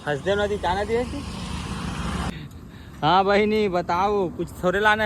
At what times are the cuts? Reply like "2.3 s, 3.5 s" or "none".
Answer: 2.3 s